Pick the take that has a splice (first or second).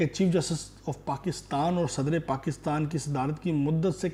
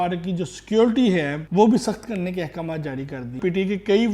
second